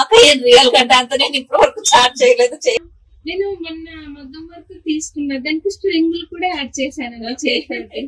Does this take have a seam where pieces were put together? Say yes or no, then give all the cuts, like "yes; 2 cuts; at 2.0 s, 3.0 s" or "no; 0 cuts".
yes; 1 cut; at 2.8 s